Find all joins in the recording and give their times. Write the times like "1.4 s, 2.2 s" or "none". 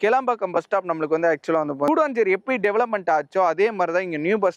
1.9 s